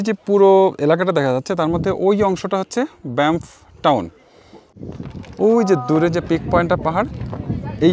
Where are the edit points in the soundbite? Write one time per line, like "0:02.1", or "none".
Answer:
0:04.7